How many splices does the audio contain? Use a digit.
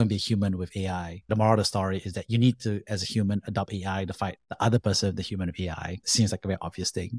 2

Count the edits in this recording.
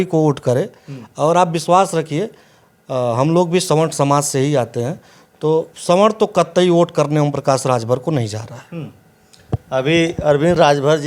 0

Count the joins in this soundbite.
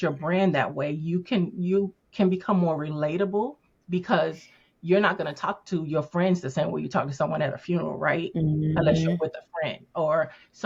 0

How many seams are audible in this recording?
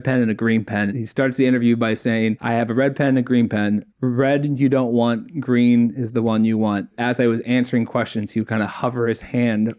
3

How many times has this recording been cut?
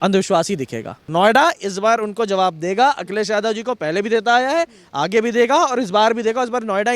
1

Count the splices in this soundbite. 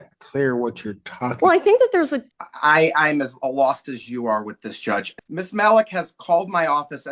2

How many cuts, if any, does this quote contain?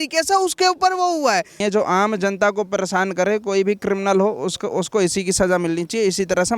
1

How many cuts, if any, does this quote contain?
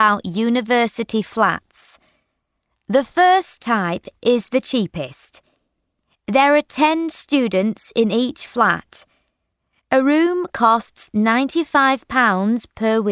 1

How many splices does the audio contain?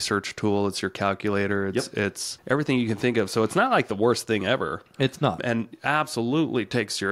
2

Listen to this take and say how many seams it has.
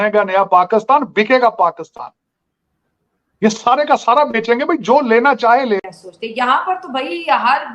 1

